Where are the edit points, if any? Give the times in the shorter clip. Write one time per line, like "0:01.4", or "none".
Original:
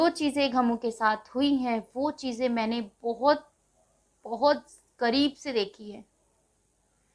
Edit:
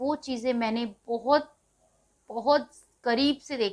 none